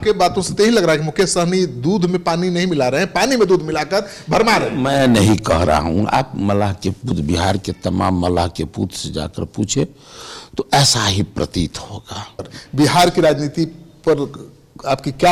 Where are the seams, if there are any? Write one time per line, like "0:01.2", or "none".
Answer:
none